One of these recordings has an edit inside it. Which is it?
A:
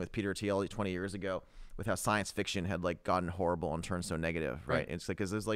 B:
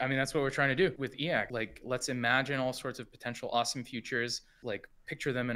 B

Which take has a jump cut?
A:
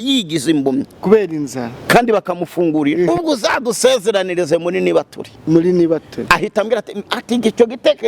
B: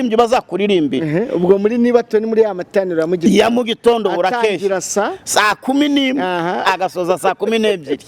A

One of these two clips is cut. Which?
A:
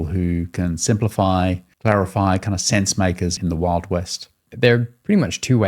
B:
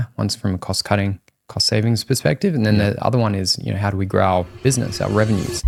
A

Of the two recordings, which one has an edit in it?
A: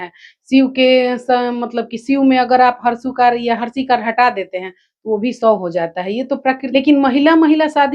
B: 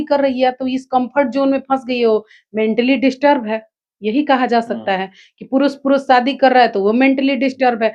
A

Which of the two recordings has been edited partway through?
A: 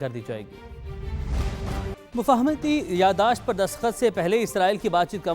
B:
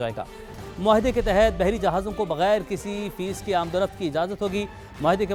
A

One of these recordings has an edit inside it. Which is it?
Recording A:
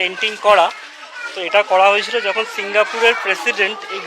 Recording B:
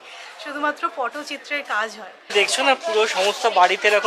B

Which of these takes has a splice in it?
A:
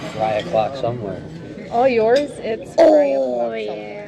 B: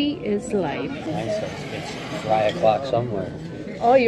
B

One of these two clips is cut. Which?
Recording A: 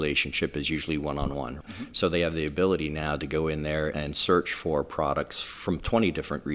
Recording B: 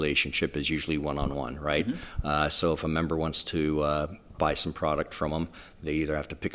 A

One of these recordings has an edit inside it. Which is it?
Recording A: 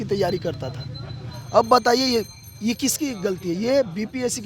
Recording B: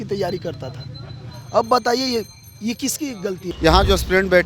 B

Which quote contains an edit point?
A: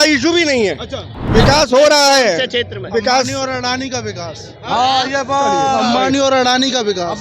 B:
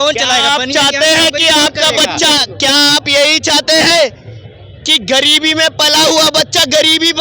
A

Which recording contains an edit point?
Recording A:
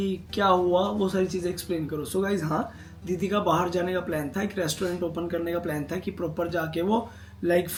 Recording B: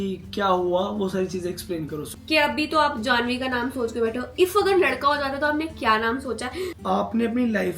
B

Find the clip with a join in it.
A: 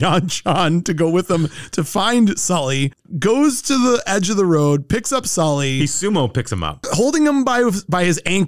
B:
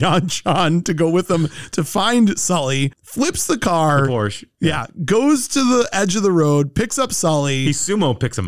A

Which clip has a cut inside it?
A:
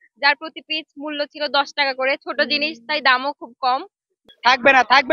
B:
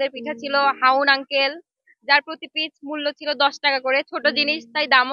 A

